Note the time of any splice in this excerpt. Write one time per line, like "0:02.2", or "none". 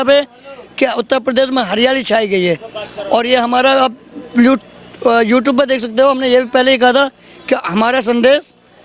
none